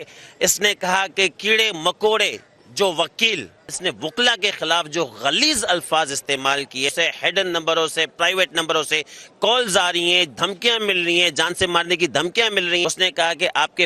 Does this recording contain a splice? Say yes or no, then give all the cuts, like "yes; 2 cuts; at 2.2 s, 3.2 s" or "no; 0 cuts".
yes; 3 cuts; at 3.7 s, 6.9 s, 12.8 s